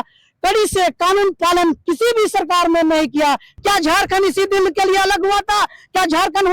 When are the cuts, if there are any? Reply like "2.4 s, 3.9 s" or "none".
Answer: 3.5 s